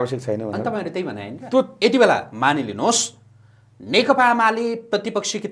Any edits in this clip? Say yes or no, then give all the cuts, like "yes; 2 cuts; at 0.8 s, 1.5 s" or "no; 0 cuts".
yes; 1 cut; at 1.7 s